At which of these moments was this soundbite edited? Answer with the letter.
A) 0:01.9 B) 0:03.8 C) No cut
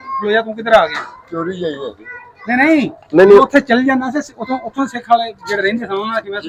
C